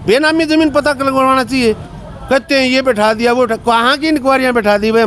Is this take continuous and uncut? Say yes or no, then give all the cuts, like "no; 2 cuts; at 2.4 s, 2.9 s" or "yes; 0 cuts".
yes; 0 cuts